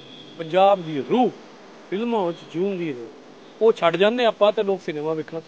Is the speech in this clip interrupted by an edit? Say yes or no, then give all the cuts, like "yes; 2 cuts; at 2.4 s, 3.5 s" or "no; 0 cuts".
no; 0 cuts